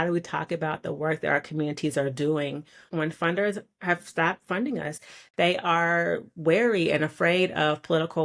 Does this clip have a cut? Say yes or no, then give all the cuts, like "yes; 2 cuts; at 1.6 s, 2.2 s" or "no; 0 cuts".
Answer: yes; 2 cuts; at 2.8 s, 5.0 s